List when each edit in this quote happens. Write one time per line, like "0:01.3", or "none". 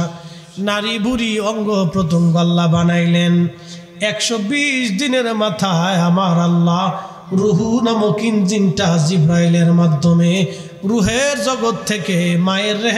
none